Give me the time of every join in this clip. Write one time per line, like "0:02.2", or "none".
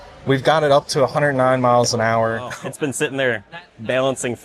0:02.4

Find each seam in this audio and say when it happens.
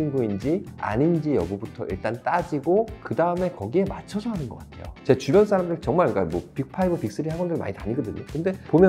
0:04.8

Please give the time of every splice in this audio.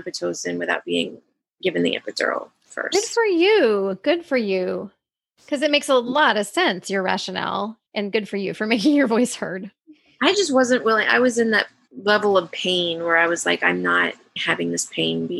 none

